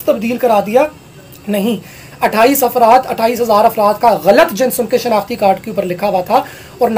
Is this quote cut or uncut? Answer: uncut